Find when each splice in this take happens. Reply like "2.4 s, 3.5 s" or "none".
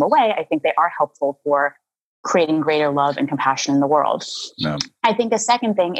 none